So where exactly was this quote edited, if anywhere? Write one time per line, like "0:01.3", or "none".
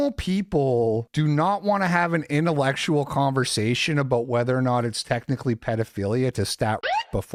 none